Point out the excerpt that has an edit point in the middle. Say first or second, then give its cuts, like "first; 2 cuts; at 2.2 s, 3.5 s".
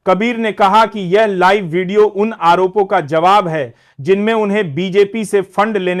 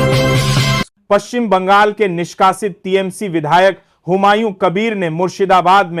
second; 1 cut; at 1.0 s